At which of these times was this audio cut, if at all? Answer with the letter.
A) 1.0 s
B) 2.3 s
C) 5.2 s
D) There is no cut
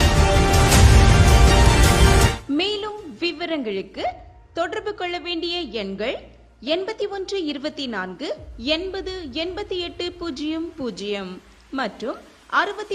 B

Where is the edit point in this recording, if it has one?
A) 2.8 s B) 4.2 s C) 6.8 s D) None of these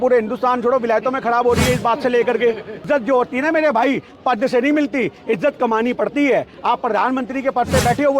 A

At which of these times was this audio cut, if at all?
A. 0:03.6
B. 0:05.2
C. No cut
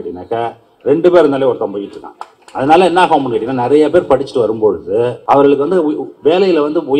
B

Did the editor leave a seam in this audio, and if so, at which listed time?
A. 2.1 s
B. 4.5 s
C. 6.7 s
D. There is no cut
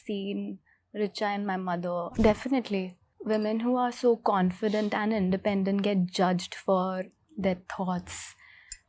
A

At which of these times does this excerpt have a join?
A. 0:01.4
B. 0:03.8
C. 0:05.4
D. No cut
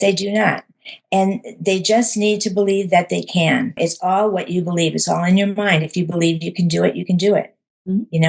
B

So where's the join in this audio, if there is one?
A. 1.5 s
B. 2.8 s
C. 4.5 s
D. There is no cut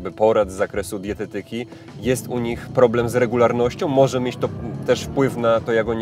D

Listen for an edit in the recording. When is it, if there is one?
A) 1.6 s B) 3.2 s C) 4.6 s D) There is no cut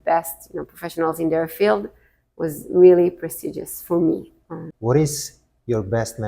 C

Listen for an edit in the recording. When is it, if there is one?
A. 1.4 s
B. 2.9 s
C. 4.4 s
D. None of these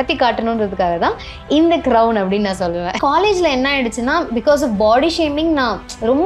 B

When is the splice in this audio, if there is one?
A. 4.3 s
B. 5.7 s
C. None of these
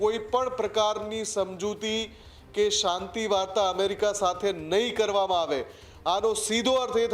C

